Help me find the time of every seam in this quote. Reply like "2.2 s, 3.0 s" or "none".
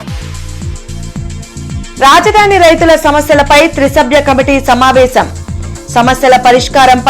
1.0 s